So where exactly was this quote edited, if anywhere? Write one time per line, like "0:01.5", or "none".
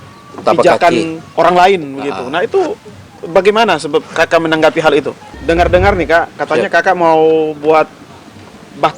0:05.3